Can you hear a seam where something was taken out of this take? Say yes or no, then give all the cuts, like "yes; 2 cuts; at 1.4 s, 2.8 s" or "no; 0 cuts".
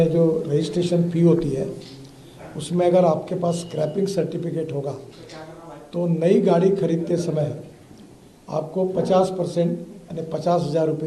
no; 0 cuts